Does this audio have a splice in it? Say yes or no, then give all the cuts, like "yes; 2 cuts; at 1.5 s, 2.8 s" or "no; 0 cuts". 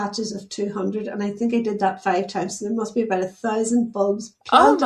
no; 0 cuts